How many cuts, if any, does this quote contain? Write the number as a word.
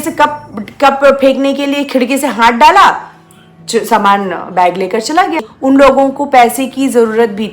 one